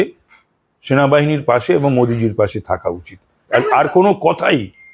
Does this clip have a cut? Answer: no; 0 cuts

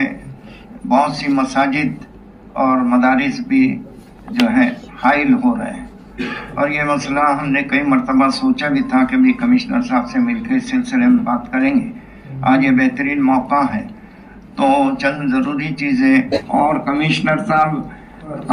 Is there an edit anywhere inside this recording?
yes; 1 cut; at 16.3 s

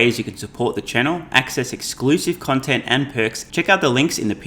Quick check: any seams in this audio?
yes; 1 cut; at 3.4 s

